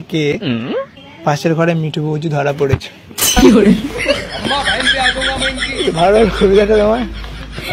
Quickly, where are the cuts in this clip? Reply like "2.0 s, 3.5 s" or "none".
none